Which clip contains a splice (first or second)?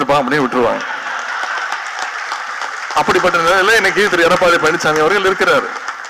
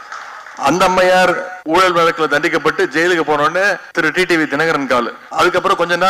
second